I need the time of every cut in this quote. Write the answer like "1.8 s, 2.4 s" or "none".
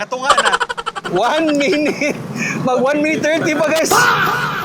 1.0 s